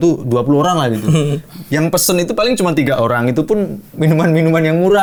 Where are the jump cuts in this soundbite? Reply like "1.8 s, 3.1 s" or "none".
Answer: none